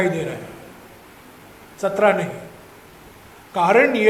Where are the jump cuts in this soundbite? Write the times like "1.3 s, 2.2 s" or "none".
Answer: none